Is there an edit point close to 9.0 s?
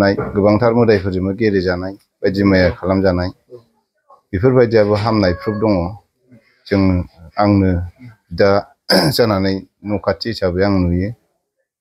no; 0 cuts

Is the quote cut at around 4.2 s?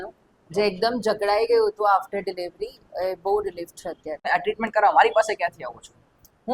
yes; 1 cut; at 4.2 s

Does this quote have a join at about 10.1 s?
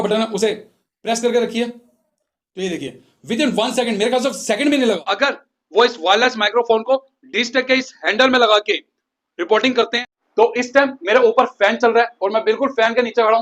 yes; 2 cuts; at 5.0 s, 10.1 s

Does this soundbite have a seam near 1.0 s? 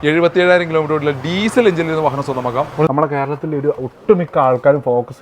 no; 1 cut; at 2.9 s

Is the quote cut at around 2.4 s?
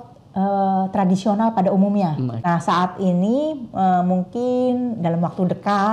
yes; 1 cut; at 2.4 s

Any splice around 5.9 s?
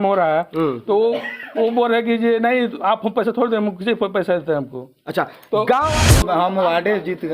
yes; 1 cut; at 5.9 s

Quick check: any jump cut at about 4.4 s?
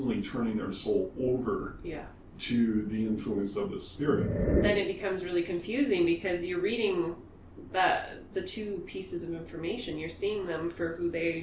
yes; 1 cut; at 4.4 s

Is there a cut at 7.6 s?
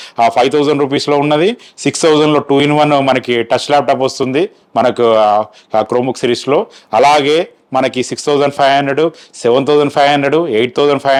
no; 0 cuts

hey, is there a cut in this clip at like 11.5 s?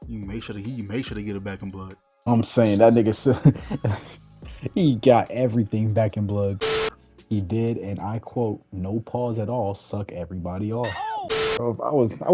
yes; 2 cuts; at 6.7 s, 11.5 s

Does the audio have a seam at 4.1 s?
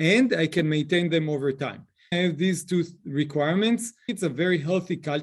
yes; 2 cuts; at 2.1 s, 4.1 s

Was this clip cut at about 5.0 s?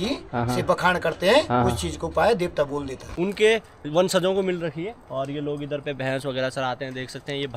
no; 1 cut; at 3.0 s

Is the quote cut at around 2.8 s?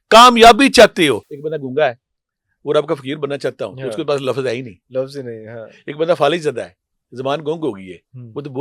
no; 1 cut; at 1.3 s

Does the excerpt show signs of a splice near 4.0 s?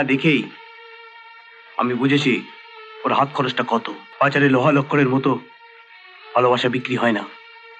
yes; 1 cut; at 4.0 s

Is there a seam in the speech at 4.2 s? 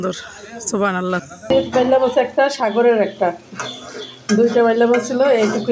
no; 1 cut; at 1.5 s

